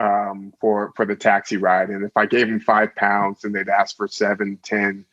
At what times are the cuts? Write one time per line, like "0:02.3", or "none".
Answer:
none